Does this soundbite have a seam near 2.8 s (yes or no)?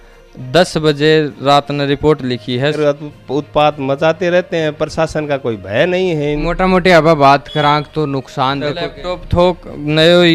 yes